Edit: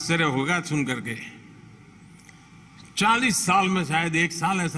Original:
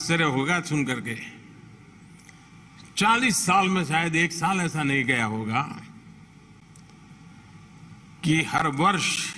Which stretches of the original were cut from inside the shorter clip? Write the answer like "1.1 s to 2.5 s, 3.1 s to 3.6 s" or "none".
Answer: none